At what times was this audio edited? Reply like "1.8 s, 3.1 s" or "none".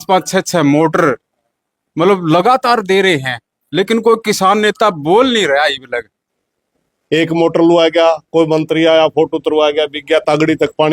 6.2 s